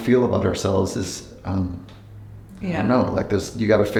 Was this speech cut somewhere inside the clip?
no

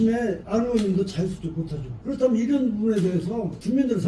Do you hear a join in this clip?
yes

